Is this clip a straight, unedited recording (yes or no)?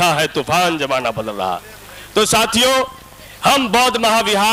yes